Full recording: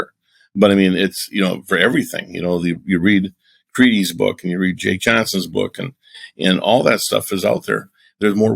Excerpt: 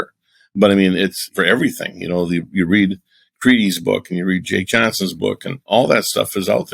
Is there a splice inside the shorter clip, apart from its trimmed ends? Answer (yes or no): yes